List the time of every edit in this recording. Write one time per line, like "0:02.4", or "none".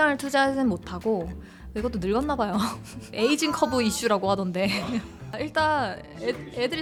none